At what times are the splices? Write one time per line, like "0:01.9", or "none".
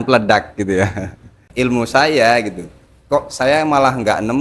0:01.4